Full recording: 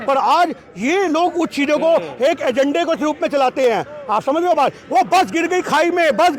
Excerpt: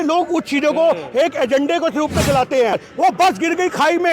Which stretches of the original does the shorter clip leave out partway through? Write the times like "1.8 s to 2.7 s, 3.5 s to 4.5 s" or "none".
3.8 s to 4.7 s